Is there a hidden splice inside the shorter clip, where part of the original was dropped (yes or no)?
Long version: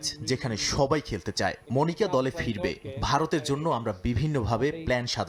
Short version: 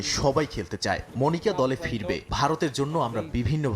yes